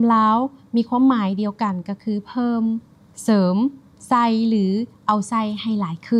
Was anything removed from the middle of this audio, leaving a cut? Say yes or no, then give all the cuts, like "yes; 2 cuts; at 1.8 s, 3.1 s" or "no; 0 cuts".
no; 0 cuts